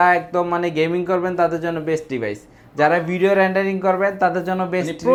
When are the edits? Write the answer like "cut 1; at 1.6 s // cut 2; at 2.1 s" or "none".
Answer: none